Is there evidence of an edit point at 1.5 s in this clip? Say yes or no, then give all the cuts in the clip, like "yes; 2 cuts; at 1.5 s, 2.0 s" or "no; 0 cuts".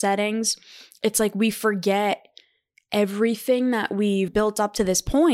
no; 1 cut; at 4.3 s